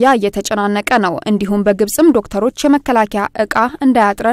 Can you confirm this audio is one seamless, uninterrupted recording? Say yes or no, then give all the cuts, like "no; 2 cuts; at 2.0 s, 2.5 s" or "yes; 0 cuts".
yes; 0 cuts